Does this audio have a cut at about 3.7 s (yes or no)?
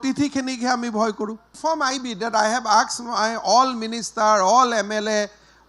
no